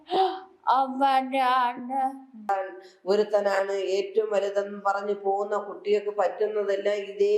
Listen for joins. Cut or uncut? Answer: cut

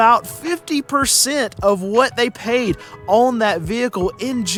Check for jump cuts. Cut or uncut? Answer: uncut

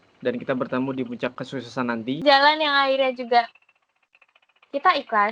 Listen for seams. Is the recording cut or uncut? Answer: cut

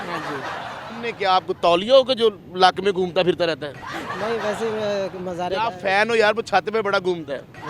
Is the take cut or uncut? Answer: cut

